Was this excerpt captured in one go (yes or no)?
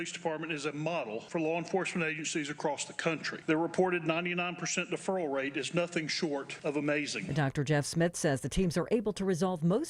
no